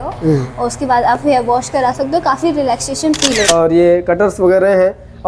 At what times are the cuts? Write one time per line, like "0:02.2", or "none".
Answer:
0:03.5